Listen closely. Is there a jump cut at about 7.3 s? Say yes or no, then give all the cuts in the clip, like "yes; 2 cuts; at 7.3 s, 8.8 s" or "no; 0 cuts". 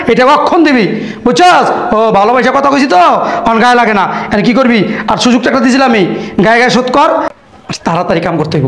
yes; 1 cut; at 7.3 s